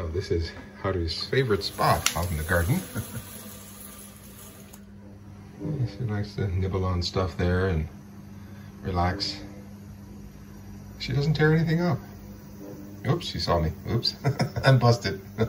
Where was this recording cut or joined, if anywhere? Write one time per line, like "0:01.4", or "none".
0:03.2
0:05.1